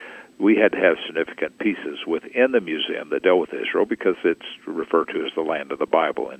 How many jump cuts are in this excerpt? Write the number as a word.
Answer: zero